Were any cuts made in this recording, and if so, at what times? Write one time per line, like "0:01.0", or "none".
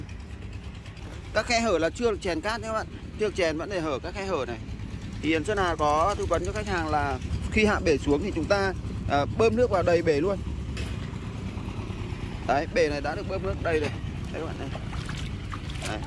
0:00.9
0:07.3